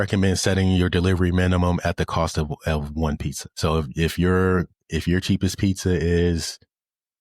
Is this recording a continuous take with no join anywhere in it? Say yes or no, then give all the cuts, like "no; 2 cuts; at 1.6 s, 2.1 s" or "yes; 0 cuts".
no; 1 cut; at 3.4 s